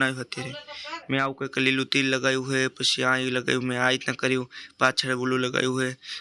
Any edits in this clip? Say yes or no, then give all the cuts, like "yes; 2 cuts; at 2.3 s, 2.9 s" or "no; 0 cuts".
no; 0 cuts